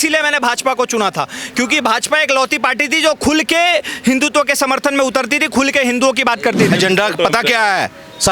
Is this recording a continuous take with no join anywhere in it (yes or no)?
no